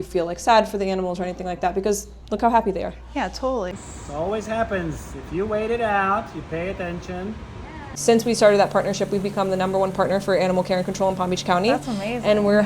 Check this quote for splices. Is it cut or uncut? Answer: cut